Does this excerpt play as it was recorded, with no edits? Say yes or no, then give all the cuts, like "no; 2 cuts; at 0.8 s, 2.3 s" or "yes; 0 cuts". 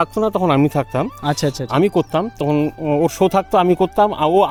yes; 0 cuts